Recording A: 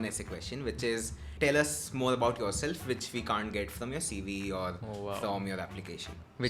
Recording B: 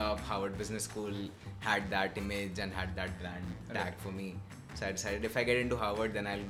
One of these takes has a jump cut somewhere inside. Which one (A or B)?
A